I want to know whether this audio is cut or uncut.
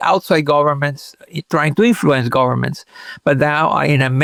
uncut